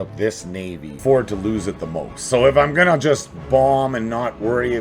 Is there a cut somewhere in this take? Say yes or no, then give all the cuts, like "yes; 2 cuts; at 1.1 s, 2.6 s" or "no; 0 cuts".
yes; 1 cut; at 1.0 s